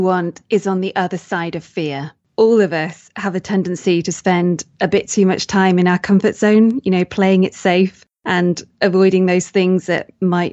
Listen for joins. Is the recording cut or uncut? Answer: cut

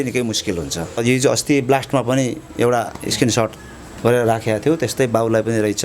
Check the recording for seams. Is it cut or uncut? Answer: cut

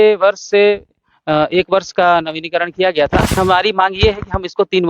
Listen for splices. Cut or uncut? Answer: cut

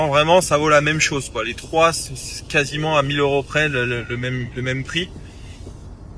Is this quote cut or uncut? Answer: uncut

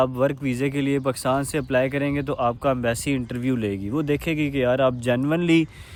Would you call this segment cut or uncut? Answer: uncut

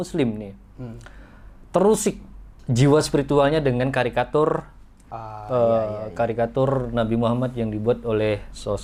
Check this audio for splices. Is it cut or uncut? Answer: uncut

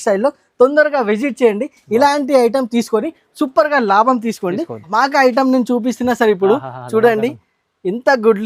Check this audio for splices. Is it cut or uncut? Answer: cut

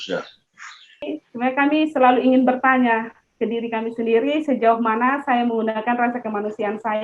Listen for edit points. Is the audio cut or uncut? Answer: cut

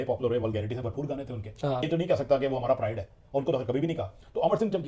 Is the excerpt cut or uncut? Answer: cut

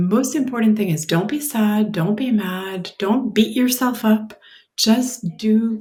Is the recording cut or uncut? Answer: uncut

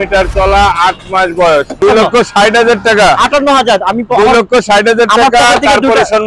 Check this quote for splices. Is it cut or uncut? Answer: cut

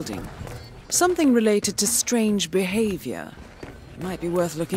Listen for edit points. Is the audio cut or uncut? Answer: uncut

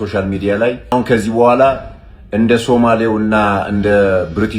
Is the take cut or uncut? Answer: cut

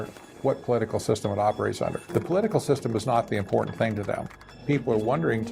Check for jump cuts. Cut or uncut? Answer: cut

